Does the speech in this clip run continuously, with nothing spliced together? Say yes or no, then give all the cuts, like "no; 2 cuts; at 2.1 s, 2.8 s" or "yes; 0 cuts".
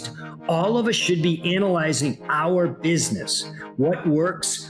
yes; 0 cuts